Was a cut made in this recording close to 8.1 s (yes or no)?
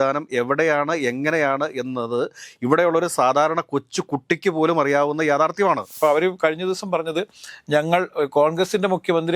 no